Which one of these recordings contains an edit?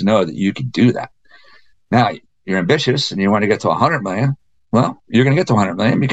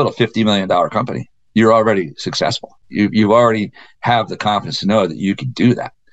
second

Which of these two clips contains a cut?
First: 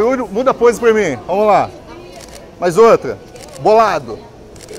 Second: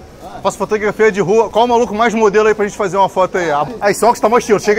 second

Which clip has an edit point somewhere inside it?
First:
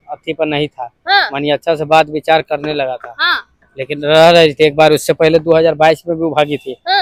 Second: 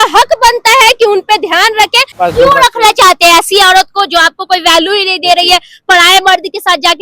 second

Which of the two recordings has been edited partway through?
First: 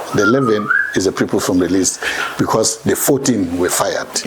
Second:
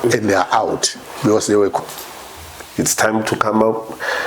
second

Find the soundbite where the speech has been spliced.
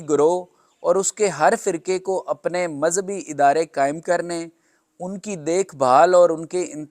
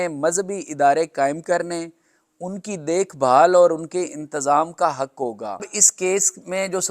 second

